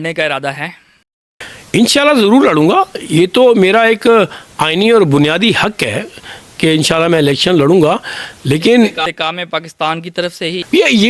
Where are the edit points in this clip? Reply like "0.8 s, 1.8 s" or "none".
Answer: none